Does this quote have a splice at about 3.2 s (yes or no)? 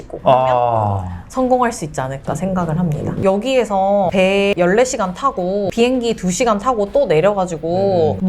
yes